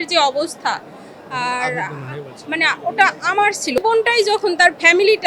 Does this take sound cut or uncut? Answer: cut